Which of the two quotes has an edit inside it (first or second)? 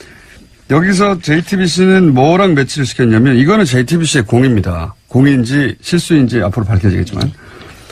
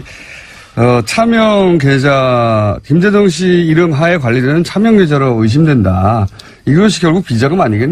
second